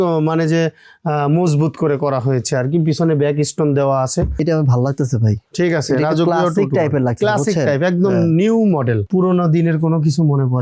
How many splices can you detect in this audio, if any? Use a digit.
2